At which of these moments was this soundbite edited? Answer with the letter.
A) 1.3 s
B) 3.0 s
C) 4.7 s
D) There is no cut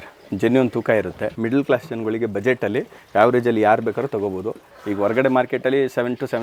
A